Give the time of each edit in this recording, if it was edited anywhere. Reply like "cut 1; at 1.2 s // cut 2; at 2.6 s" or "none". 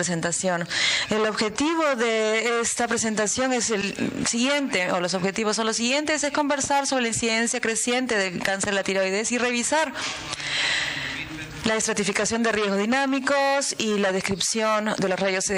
cut 1; at 8.8 s